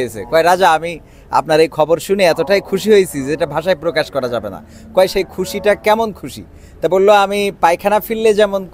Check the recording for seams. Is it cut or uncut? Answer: uncut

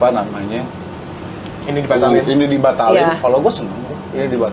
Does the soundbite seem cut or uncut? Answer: uncut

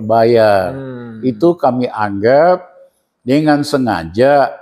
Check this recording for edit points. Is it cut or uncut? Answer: uncut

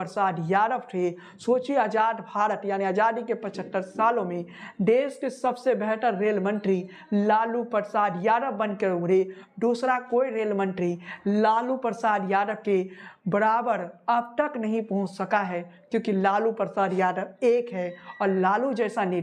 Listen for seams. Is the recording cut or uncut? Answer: uncut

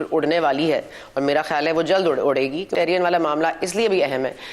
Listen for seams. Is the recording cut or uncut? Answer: cut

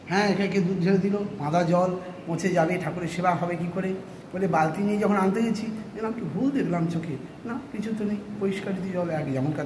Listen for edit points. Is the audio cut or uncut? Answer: uncut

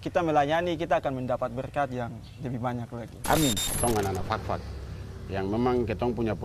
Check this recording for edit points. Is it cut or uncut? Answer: cut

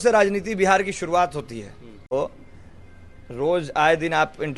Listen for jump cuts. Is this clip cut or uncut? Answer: cut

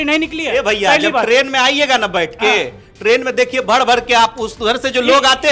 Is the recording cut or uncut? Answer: uncut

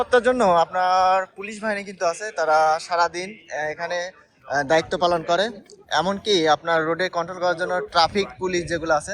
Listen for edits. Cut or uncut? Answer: uncut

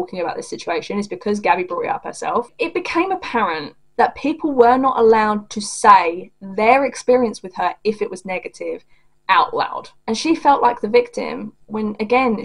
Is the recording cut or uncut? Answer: cut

